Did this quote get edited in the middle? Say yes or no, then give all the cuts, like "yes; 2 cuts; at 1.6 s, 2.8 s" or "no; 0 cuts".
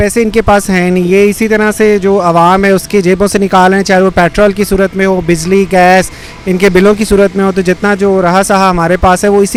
no; 0 cuts